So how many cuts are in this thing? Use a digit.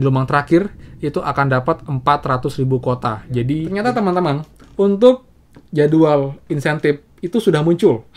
1